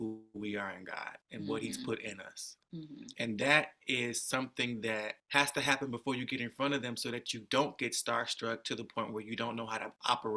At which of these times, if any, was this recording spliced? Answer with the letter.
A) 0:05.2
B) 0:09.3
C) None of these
A